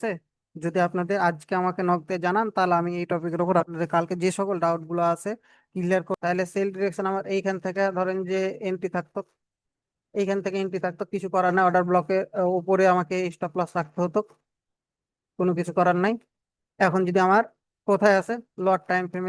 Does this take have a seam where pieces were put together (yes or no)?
yes